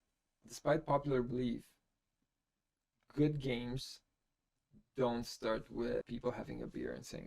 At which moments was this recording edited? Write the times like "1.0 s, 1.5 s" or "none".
6.0 s